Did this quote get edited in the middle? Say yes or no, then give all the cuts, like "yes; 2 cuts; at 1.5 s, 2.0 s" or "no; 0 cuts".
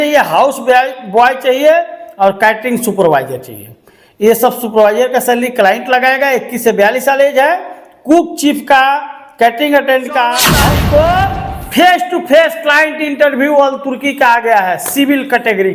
yes; 1 cut; at 10.5 s